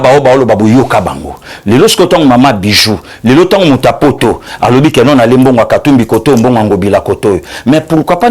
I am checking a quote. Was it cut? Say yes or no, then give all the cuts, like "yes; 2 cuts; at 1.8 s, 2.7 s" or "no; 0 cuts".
no; 0 cuts